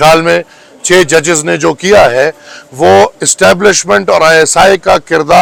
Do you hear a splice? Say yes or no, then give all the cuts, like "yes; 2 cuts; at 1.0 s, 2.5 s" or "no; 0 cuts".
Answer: no; 0 cuts